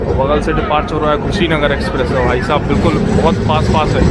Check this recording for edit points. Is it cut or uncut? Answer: uncut